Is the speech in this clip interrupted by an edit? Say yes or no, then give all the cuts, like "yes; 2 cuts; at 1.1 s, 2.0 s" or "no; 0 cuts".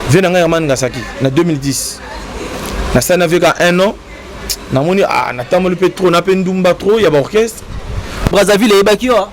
yes; 1 cut; at 8.3 s